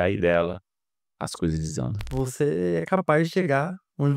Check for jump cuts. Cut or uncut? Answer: cut